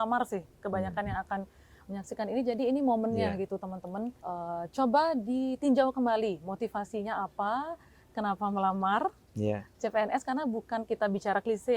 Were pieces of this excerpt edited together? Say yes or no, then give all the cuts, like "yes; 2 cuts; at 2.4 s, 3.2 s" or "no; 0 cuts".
yes; 1 cut; at 4.2 s